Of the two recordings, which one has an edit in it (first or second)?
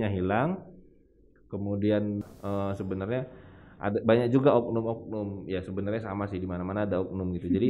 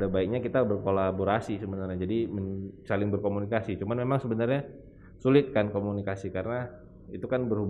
first